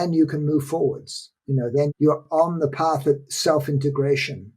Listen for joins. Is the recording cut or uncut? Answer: cut